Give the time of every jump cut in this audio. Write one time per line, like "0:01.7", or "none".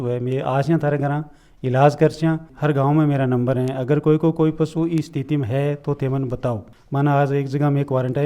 0:02.5
0:06.7